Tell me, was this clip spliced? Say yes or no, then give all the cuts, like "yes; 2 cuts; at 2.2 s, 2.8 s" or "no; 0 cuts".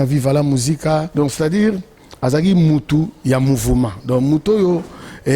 yes; 1 cut; at 1.1 s